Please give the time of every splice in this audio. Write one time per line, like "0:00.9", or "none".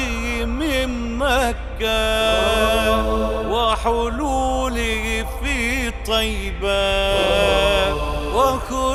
none